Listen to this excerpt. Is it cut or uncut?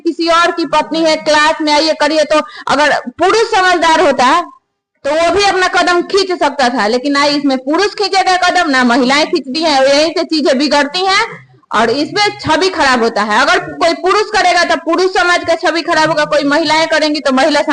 uncut